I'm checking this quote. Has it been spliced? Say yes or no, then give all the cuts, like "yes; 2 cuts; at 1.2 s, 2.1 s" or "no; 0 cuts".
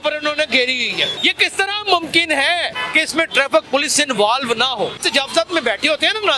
yes; 3 cuts; at 1.1 s, 2.8 s, 5.0 s